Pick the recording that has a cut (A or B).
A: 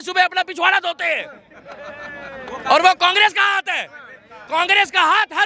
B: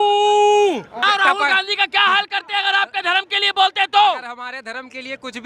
B